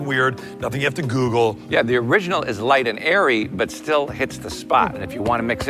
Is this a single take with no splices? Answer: yes; 0 cuts

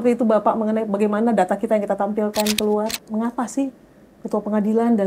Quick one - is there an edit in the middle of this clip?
yes; 1 cut; at 3.0 s

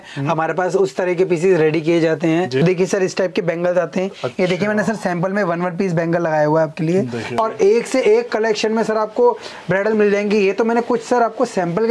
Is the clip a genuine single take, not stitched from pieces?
no; 2 cuts; at 2.6 s, 7.2 s

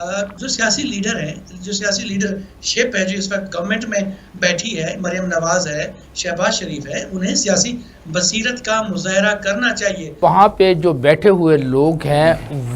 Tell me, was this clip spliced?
yes; 1 cut; at 10.2 s

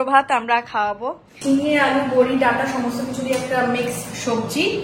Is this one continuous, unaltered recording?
no; 1 cut; at 1.3 s

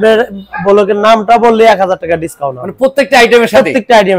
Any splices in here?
no; 0 cuts

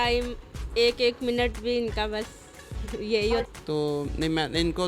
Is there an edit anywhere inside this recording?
yes; 1 cut; at 3.5 s

